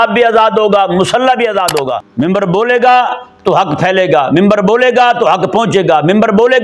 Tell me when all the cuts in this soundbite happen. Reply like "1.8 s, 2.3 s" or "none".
2.0 s